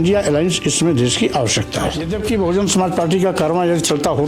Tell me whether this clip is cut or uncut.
cut